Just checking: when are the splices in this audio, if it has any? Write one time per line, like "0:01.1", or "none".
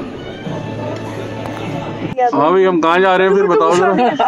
0:02.1